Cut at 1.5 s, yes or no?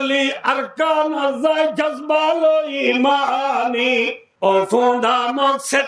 no